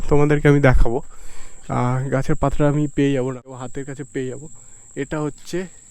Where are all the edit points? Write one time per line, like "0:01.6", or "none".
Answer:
0:03.5

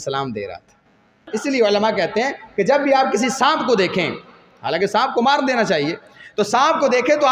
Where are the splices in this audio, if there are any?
0:01.2

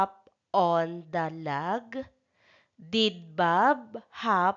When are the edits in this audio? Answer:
none

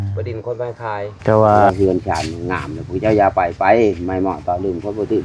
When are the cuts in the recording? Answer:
0:01.7

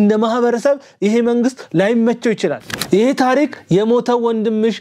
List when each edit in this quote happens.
0:02.7

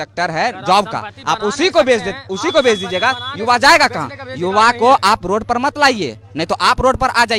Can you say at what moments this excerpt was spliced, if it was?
none

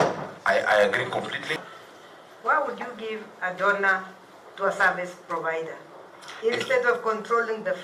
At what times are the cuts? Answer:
0:01.4

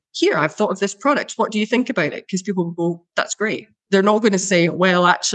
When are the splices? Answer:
0:03.5

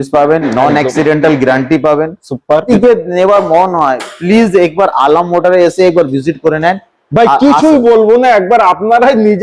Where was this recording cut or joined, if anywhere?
0:02.6

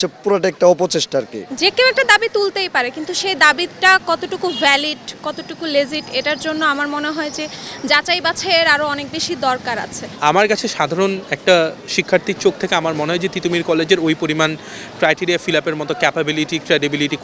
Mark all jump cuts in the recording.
0:01.4
0:10.0

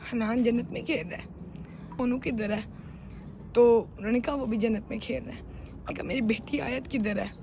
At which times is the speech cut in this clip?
0:01.9
0:05.9

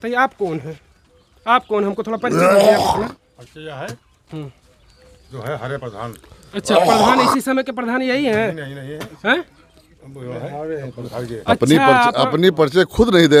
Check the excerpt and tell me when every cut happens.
none

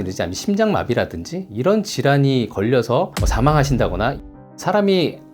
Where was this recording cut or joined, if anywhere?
0:03.2
0:04.2

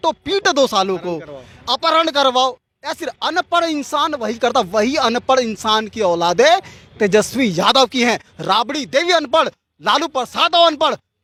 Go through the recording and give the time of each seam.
none

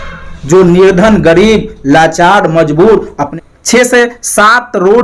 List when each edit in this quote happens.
0:03.2

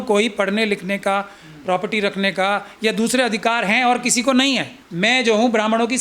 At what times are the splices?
0:04.8

